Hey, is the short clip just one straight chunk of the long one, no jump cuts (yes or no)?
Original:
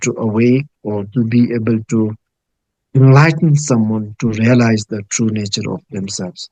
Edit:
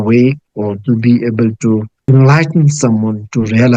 no